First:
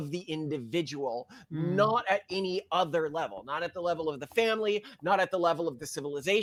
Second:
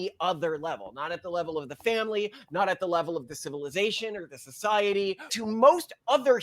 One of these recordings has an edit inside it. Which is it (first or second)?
second